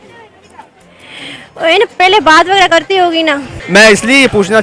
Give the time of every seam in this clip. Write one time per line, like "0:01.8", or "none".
0:03.6